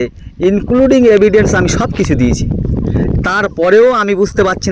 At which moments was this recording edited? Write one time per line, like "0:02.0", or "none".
none